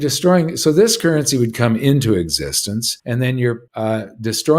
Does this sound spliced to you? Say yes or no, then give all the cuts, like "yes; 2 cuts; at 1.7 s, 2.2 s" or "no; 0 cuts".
yes; 2 cuts; at 2.9 s, 3.7 s